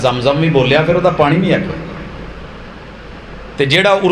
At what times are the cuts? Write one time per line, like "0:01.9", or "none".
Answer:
0:02.3